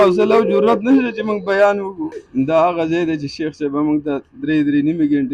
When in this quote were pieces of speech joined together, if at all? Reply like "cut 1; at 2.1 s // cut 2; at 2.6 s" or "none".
cut 1; at 2.2 s